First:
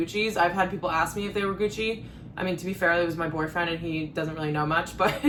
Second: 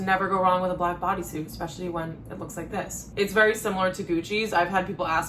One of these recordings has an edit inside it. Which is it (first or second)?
second